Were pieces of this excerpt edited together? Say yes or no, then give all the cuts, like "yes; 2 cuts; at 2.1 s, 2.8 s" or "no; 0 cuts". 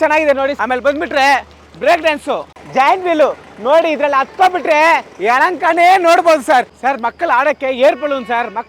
yes; 2 cuts; at 2.5 s, 6.7 s